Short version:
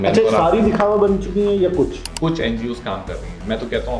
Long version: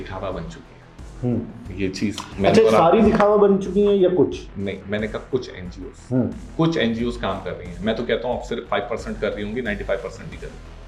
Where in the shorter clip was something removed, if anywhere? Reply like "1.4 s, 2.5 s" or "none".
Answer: 2.1 s

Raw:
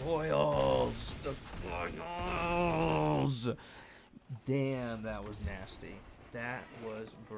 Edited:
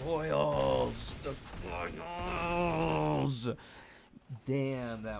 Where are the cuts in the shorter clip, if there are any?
none

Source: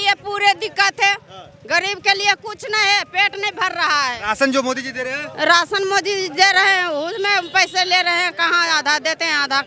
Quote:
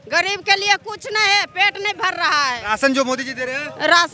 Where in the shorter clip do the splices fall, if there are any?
none

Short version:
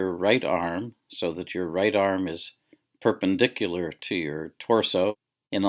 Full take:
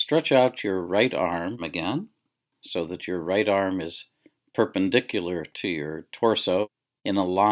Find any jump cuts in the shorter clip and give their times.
0.9 s

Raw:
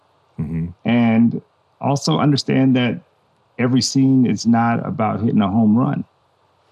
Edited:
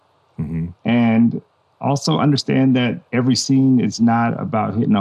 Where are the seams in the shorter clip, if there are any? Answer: 3.0 s

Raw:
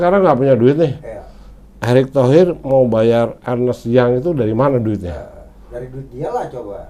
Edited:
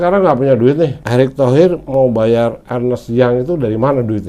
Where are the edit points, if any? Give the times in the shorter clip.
1.0 s

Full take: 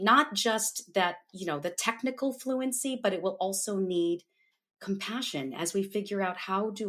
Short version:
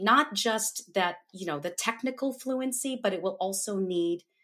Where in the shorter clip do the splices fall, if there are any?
none

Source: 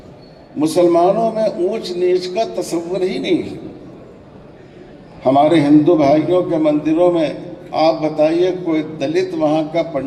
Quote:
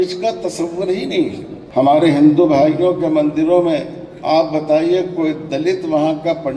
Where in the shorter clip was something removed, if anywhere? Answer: 1.5 s

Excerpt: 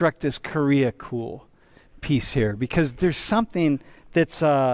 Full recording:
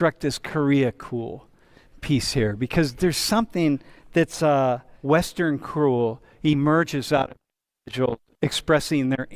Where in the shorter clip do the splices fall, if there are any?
none

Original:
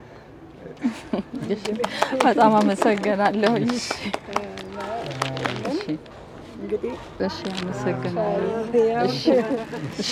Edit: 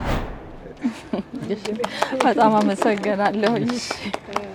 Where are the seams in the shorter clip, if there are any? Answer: none

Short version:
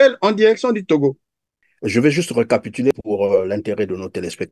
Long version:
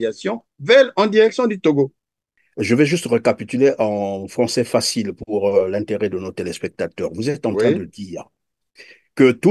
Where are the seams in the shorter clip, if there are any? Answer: 2.9 s

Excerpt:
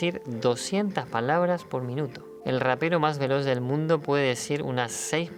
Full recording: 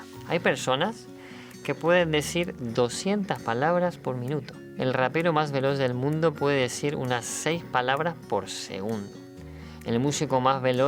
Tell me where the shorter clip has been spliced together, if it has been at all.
none

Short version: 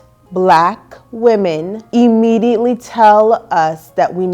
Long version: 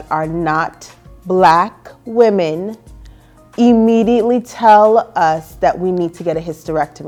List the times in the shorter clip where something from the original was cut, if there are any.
1.7 s

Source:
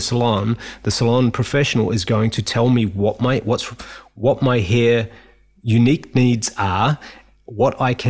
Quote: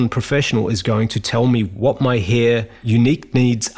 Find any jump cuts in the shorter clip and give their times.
1.7 s, 2.7 s

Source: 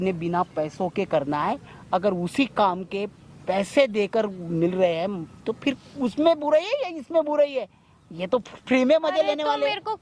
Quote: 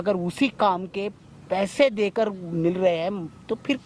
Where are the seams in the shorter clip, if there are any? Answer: none

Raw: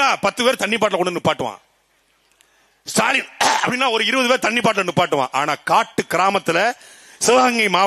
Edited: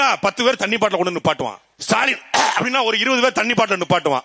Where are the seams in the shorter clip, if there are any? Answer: 1.7 s

